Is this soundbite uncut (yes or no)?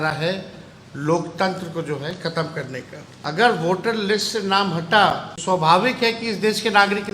no